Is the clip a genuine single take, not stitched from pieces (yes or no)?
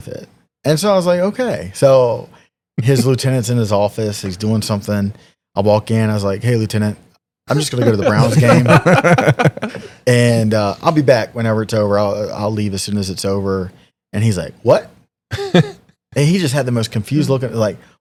yes